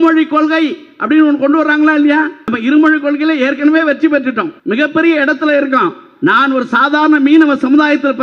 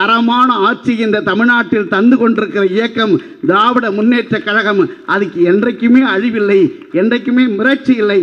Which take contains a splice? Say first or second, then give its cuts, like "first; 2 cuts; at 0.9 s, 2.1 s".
first; 2 cuts; at 2.4 s, 4.5 s